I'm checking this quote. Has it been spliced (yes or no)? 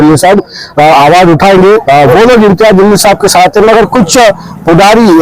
yes